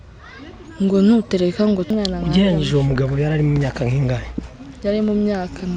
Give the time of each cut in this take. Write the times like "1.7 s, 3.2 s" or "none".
1.9 s